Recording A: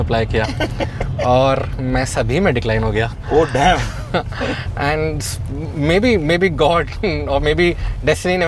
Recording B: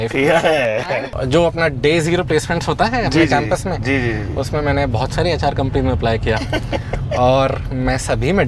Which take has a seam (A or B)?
B